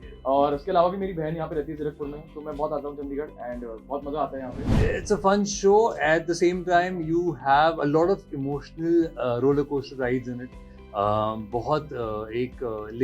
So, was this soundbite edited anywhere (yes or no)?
yes